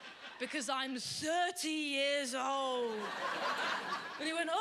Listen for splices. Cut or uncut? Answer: uncut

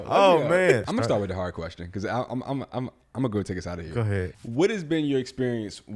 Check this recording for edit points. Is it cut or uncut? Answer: cut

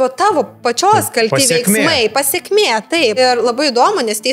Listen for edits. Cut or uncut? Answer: cut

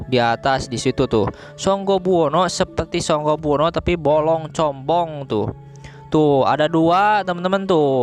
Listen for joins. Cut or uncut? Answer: uncut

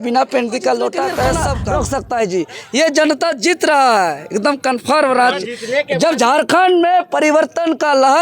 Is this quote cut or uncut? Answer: cut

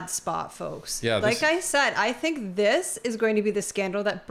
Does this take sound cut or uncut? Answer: uncut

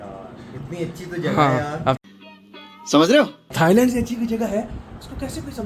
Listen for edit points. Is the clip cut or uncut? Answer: uncut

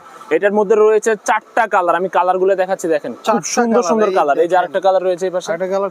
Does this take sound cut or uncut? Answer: uncut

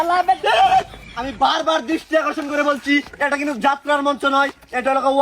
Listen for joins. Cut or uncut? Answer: uncut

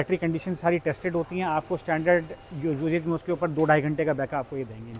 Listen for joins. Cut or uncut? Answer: uncut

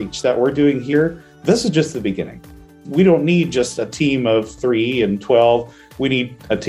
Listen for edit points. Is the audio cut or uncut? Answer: cut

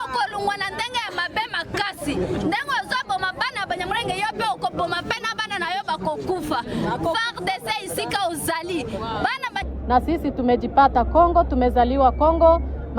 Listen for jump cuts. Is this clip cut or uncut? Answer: cut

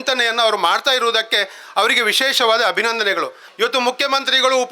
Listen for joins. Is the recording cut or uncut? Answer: cut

